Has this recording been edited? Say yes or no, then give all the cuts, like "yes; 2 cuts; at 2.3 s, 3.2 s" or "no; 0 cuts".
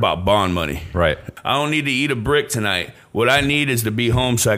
yes; 1 cut; at 1.3 s